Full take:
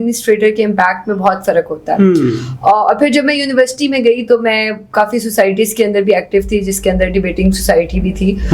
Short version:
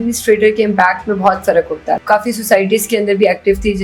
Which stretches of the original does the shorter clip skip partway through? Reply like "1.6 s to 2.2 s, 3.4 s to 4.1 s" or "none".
2.0 s to 4.8 s